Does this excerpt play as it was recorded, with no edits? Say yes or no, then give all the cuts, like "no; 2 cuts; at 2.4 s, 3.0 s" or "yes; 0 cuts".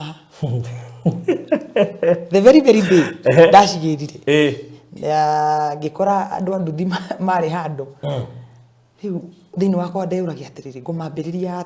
yes; 0 cuts